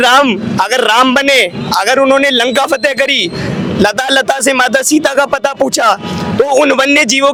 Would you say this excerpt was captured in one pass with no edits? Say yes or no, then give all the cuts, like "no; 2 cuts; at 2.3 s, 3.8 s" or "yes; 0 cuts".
yes; 0 cuts